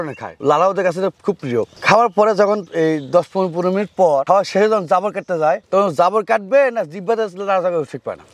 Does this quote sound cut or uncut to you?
uncut